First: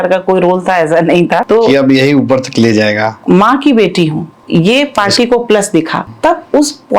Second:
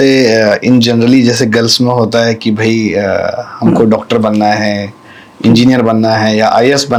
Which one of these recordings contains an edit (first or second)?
first